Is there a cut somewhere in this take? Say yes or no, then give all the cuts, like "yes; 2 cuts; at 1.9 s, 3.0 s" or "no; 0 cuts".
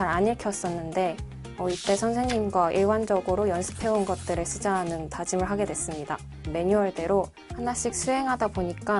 yes; 2 cuts; at 6.5 s, 7.4 s